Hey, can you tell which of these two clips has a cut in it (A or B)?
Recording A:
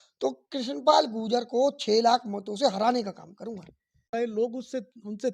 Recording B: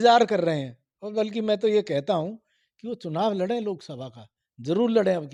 A